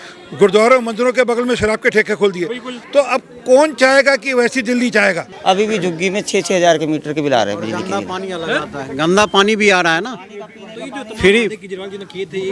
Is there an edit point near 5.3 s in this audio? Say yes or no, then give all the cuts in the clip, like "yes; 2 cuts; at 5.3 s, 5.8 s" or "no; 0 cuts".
yes; 1 cut; at 5.3 s